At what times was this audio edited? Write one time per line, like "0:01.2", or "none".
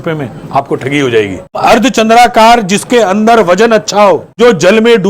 0:01.6
0:04.3